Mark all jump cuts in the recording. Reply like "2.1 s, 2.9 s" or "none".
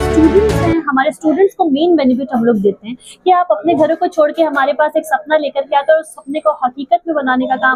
none